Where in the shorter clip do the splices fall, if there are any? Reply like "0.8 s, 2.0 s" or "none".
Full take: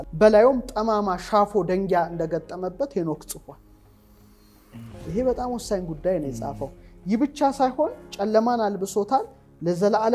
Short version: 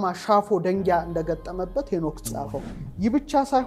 2.3 s